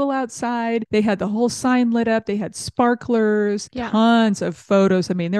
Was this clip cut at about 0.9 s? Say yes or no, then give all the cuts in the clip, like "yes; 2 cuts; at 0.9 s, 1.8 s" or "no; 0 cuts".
yes; 2 cuts; at 0.9 s, 3.7 s